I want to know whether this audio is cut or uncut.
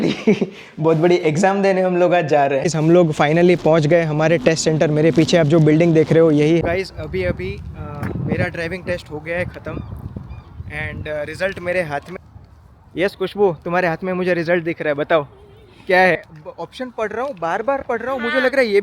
cut